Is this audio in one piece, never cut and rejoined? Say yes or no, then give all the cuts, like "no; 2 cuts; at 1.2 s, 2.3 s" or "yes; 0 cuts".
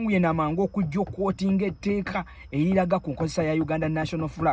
yes; 0 cuts